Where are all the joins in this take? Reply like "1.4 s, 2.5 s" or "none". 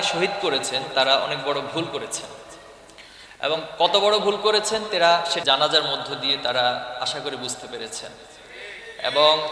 none